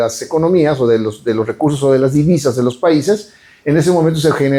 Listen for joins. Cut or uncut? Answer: uncut